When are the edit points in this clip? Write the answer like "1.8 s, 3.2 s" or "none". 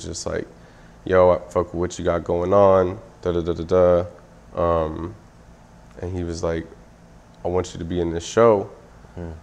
none